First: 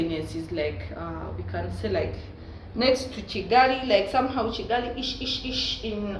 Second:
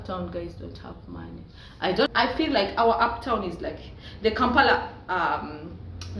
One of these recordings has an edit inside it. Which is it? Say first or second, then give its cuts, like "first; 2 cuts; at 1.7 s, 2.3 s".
second; 1 cut; at 2.1 s